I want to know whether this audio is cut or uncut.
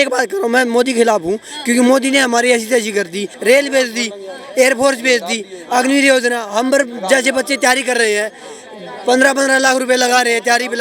cut